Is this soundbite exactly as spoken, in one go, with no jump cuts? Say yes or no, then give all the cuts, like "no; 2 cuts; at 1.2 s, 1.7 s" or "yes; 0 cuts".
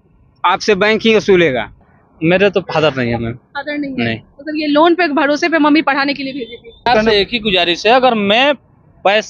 no; 2 cuts; at 1.8 s, 6.9 s